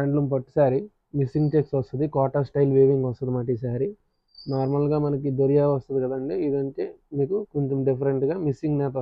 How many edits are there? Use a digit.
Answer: 0